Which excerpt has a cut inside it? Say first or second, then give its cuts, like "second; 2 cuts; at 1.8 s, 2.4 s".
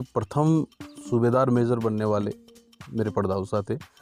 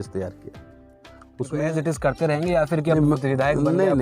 second; 1 cut; at 1.6 s